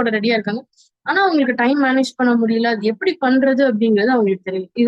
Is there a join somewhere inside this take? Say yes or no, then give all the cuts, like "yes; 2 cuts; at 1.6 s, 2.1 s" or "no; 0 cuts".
no; 0 cuts